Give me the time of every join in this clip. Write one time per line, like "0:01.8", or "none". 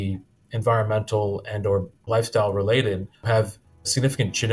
0:02.0
0:03.3